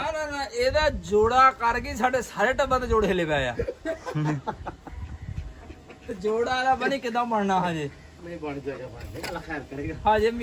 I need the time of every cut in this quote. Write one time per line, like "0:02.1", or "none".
none